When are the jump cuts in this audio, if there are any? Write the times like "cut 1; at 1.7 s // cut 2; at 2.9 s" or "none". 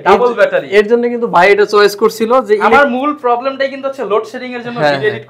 none